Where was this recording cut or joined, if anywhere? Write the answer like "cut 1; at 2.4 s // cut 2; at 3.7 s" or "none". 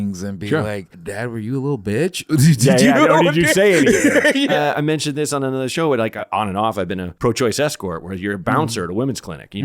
cut 1; at 1.0 s // cut 2; at 4.5 s // cut 3; at 6.1 s // cut 4; at 7.1 s

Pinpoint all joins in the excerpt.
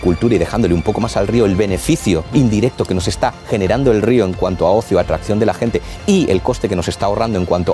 cut 1; at 2.3 s

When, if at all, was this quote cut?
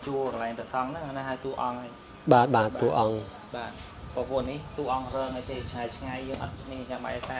none

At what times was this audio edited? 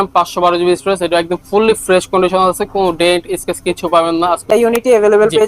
cut 1; at 4.5 s

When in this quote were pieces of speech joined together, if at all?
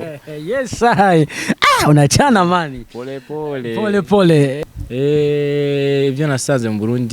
cut 1; at 4.6 s

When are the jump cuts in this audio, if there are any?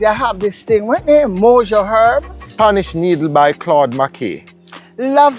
cut 1; at 2.4 s

